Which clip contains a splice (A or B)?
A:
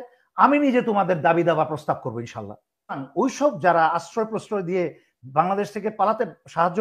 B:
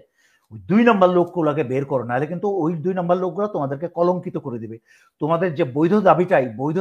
A